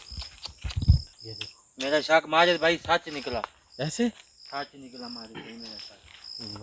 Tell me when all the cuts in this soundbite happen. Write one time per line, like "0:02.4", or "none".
0:01.1

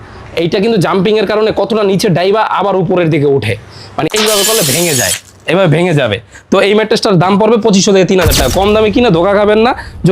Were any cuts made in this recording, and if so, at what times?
0:04.1

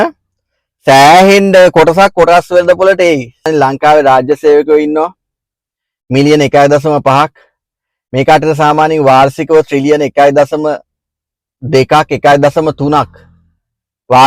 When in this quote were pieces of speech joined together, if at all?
0:03.5

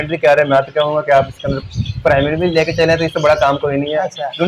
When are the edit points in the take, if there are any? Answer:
none

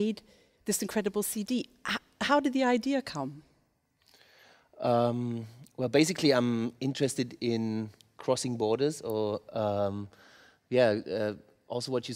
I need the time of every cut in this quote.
none

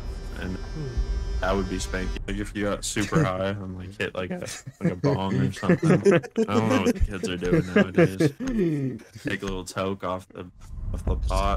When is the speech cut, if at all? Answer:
0:02.1

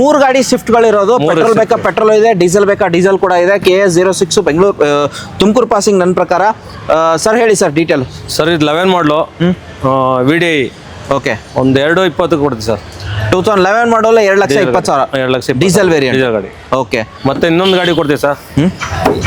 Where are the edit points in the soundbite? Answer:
none

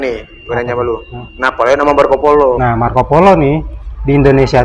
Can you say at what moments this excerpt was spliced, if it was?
0:02.6

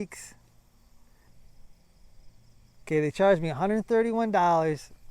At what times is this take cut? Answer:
0:01.3

